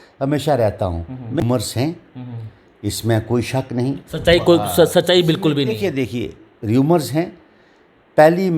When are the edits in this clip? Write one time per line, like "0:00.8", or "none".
0:01.4